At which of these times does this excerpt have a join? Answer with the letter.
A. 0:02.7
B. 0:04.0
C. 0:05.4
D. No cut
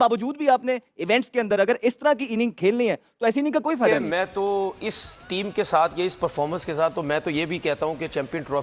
B